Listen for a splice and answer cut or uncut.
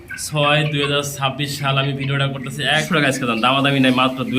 cut